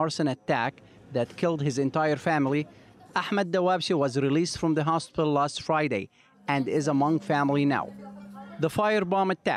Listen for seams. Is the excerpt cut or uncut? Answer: cut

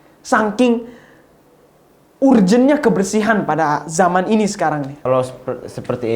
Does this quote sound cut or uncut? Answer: cut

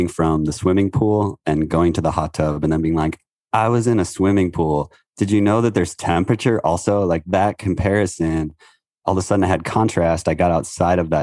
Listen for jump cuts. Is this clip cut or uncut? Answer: uncut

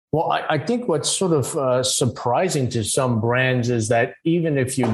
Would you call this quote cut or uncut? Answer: uncut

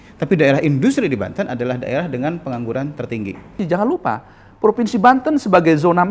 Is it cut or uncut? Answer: cut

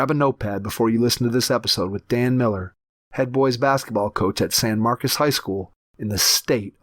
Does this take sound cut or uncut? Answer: uncut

